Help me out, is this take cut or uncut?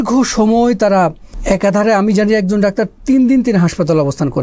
cut